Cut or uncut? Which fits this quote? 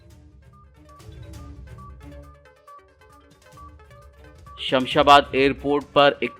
cut